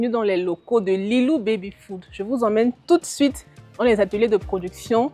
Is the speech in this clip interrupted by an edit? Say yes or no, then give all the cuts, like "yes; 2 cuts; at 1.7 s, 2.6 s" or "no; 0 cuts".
no; 0 cuts